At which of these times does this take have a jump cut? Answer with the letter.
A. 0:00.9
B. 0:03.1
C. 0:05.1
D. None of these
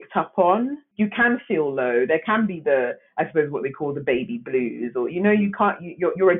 A